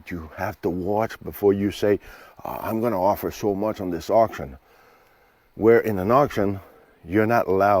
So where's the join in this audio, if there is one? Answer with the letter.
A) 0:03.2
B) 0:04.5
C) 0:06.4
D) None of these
D